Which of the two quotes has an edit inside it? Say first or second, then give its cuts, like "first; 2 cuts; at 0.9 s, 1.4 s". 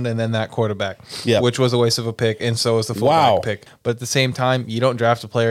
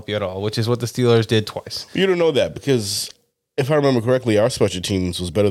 first; 1 cut; at 3.6 s